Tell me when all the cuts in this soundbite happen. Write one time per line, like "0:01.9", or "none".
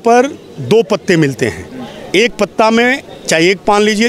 none